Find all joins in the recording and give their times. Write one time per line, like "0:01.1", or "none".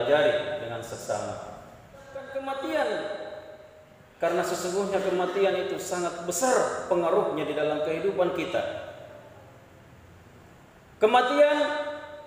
0:02.3